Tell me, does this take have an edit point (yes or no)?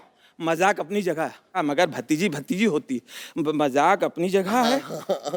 no